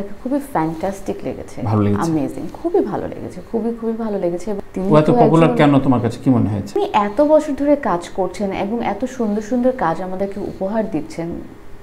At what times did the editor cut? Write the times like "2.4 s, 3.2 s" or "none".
4.6 s, 6.8 s